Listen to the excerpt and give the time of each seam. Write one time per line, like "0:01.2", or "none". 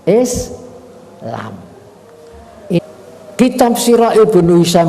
0:02.8